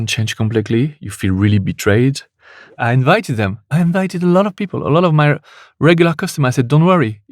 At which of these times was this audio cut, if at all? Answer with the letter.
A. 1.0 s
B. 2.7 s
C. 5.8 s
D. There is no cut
B